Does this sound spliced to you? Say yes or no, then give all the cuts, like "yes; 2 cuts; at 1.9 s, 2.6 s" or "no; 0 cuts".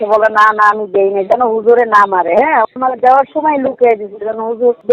no; 0 cuts